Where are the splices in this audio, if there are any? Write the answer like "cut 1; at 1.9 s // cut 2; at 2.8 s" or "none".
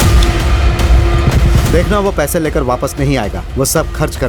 cut 1; at 1.6 s